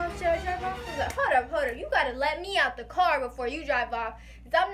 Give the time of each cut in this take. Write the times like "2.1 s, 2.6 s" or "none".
none